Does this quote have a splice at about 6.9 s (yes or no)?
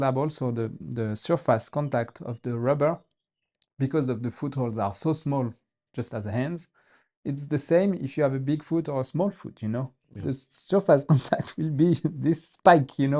no